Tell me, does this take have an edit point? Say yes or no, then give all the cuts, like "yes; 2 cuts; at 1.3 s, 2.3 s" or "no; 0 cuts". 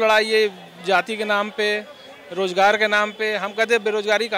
no; 0 cuts